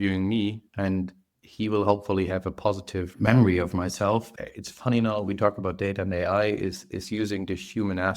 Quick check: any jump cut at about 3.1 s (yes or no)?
yes